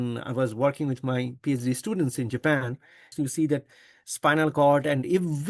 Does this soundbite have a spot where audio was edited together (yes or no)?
yes